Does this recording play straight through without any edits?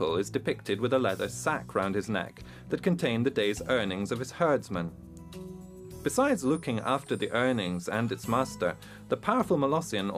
yes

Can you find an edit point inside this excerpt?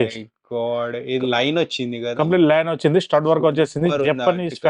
no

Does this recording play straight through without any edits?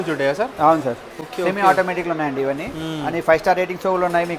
yes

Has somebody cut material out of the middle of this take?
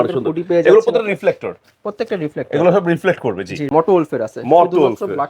yes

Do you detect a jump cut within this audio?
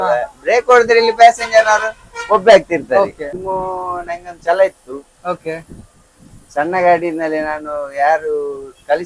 yes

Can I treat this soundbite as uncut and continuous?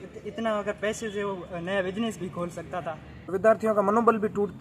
no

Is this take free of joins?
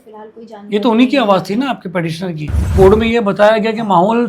no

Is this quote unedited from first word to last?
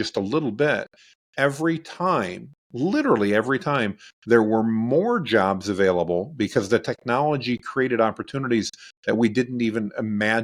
yes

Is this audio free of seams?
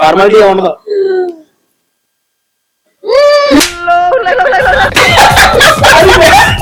yes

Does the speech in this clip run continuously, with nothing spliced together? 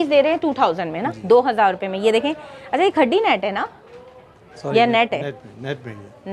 yes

